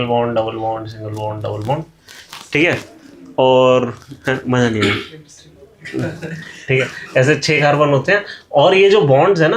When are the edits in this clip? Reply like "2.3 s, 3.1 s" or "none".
none